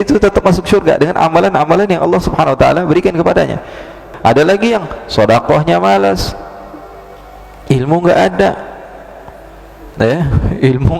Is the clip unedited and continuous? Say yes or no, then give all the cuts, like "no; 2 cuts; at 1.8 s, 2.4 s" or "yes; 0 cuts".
no; 1 cut; at 4.1 s